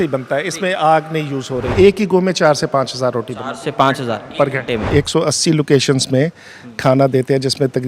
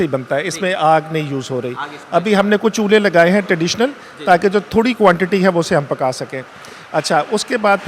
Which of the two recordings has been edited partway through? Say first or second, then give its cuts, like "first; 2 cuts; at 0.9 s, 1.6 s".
first; 2 cuts; at 1.7 s, 4.9 s